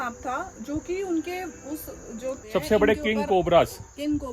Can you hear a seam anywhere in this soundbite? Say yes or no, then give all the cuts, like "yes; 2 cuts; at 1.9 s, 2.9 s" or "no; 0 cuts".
yes; 1 cut; at 2.4 s